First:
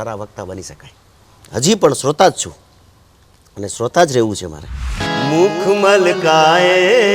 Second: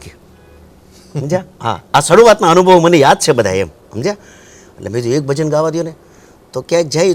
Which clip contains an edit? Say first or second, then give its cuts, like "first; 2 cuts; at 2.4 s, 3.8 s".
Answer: first; 1 cut; at 5.1 s